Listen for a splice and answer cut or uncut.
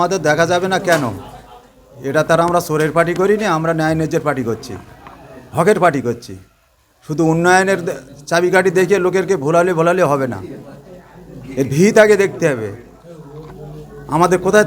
uncut